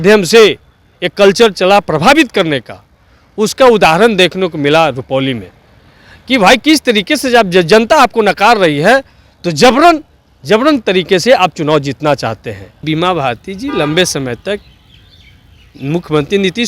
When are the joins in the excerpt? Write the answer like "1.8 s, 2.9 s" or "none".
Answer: 12.8 s